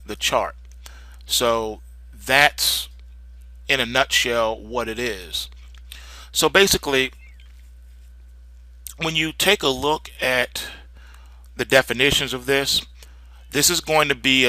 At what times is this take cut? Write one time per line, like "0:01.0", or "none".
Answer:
0:07.7